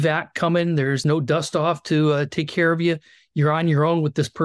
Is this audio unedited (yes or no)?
no